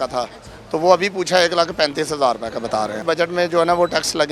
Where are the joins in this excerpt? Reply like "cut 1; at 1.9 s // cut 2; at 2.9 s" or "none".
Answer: cut 1; at 3.0 s